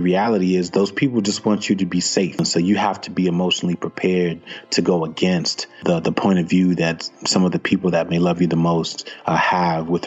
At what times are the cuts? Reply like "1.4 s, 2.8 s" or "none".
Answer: 2.4 s, 5.8 s